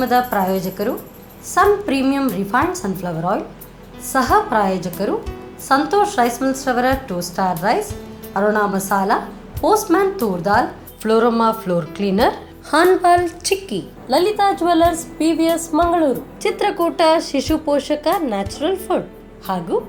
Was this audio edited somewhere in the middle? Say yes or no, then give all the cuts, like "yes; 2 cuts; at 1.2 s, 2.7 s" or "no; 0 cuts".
no; 0 cuts